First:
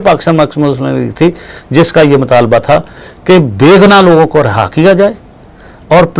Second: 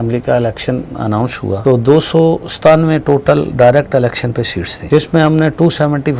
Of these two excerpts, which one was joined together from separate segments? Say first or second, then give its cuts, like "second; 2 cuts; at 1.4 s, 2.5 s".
second; 2 cuts; at 1.6 s, 4.8 s